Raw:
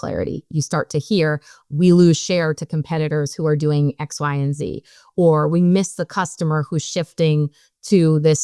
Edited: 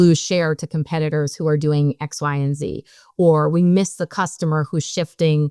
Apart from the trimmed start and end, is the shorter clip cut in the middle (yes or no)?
no